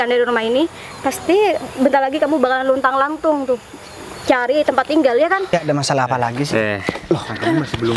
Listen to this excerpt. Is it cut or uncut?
cut